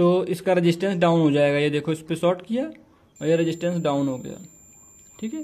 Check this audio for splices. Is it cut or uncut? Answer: uncut